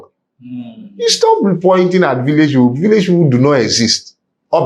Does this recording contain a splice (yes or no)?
no